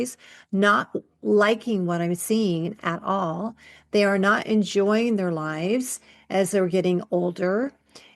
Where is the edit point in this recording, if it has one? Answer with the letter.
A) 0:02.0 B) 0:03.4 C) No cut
C